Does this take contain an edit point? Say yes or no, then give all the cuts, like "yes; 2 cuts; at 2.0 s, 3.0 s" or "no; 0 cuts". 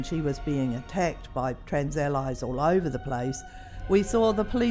no; 0 cuts